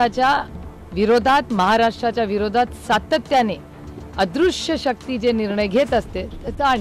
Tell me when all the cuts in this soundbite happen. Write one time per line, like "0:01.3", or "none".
none